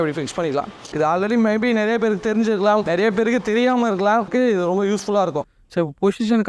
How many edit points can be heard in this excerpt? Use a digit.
4